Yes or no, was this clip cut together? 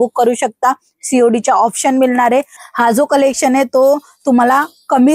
yes